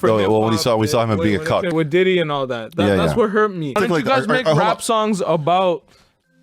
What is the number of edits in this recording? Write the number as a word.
two